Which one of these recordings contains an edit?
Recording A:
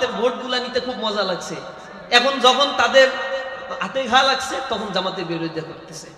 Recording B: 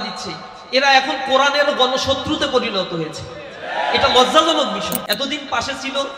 B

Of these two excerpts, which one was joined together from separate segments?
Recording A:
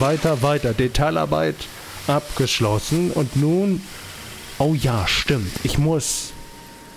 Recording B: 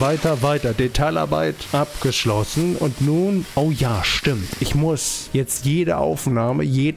B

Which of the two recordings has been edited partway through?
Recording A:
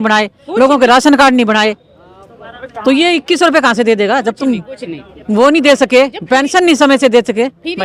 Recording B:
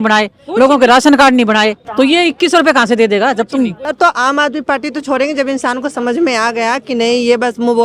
B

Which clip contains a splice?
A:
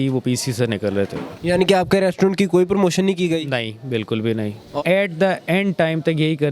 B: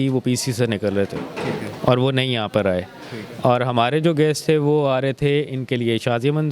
A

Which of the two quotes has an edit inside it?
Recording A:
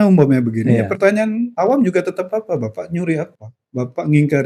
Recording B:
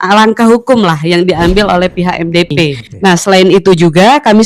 B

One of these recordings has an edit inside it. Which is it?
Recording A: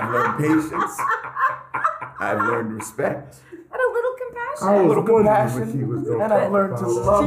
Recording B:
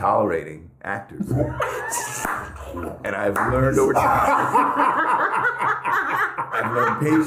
B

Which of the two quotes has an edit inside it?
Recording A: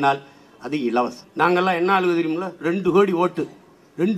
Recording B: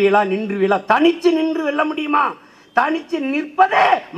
A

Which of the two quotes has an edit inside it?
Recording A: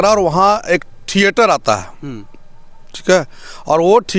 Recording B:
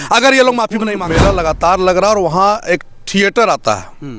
B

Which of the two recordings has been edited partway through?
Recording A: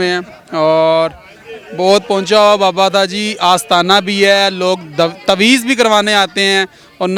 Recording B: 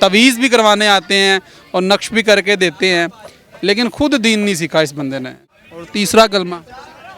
B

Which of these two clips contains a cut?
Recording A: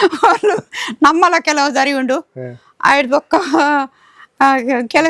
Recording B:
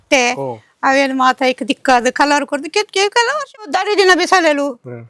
B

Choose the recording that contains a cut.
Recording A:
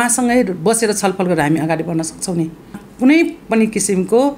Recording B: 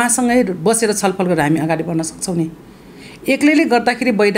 A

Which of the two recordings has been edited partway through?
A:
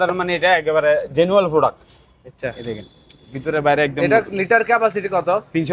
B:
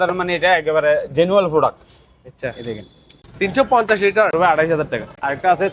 B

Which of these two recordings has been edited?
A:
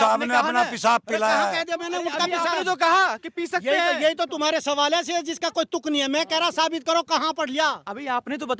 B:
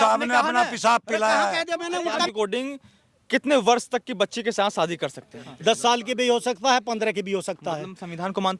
B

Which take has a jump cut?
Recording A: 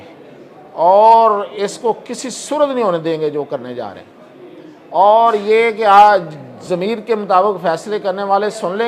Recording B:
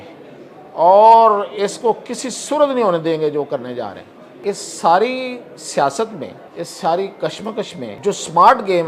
B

